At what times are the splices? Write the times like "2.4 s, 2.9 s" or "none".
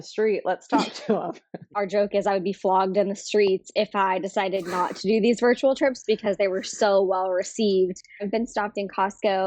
1.6 s, 8.1 s